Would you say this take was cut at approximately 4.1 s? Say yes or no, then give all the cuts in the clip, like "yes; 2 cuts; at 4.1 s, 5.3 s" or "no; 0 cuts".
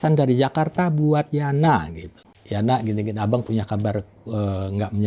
no; 1 cut; at 2.3 s